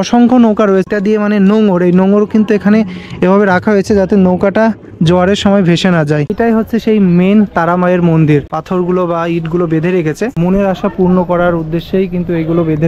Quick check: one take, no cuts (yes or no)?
no